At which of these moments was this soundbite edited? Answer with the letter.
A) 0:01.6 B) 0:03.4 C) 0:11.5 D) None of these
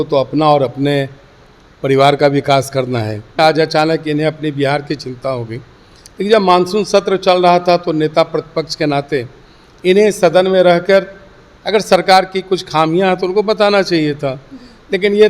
B